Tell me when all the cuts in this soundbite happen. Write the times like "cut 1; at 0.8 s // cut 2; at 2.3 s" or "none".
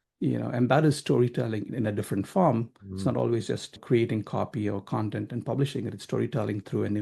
cut 1; at 1.7 s // cut 2; at 3.7 s